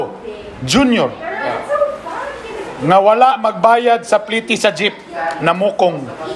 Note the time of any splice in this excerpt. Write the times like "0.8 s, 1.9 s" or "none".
none